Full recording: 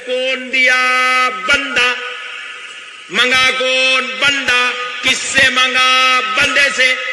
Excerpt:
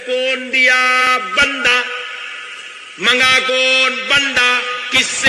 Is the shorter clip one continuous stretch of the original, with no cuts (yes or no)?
no